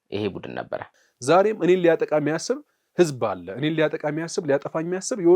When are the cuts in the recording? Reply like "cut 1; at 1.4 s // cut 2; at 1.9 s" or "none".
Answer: cut 1; at 0.9 s